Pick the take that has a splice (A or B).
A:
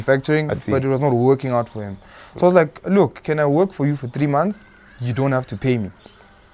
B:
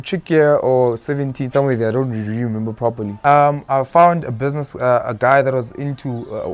B